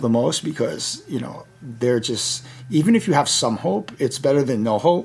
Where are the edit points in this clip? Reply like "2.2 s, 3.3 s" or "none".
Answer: none